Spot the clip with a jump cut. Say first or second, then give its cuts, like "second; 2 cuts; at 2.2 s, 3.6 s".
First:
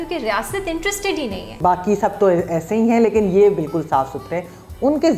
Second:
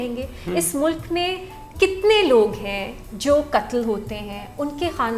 first; 1 cut; at 1.5 s